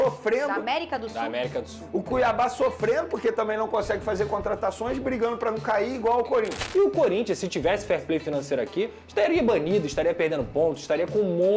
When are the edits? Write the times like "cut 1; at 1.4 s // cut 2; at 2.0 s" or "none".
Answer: cut 1; at 6.6 s